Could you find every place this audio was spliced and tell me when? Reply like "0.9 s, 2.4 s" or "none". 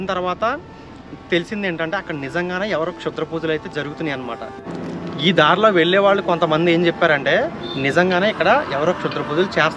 4.7 s